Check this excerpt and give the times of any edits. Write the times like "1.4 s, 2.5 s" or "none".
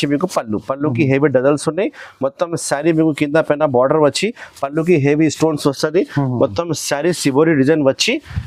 none

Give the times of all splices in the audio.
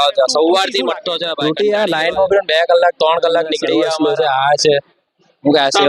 1.3 s, 3.9 s

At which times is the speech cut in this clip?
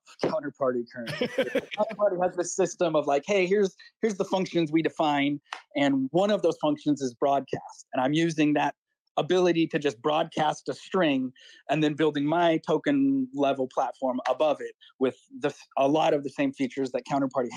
none

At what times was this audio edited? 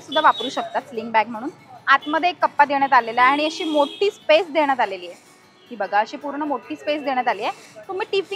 none

